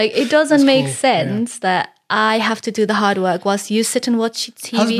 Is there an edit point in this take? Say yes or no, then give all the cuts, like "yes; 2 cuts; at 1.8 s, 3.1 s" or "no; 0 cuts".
no; 0 cuts